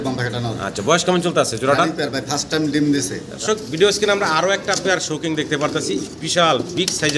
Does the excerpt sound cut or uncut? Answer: cut